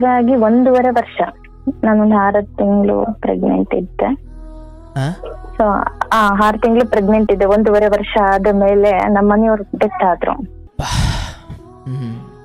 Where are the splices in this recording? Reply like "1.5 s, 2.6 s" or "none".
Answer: 10.6 s